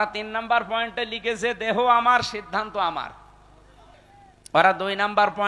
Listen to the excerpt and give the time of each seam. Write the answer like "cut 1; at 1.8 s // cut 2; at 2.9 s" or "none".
cut 1; at 4.1 s